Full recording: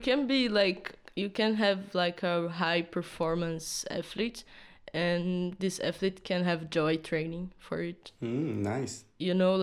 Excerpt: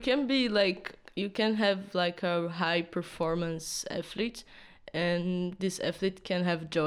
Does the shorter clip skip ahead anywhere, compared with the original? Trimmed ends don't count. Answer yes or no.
no